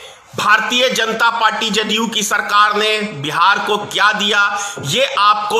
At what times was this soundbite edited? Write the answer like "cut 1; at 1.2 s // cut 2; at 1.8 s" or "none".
none